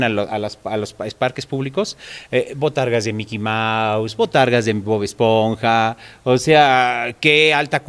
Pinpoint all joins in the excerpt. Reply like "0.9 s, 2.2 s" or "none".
none